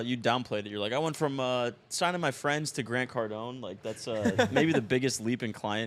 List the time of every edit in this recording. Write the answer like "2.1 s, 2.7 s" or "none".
none